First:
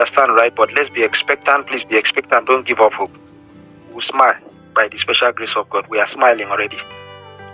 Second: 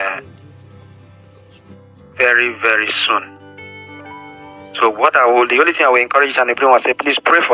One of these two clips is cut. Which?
second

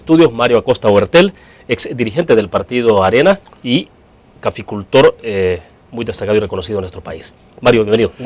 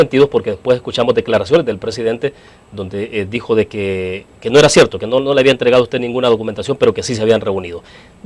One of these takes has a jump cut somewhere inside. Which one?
first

